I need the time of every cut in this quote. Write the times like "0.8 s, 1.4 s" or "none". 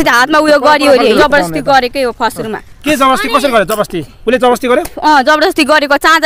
1.2 s